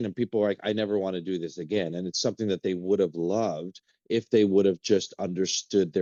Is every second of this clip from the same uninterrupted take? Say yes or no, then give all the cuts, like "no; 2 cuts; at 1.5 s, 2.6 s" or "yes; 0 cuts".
yes; 0 cuts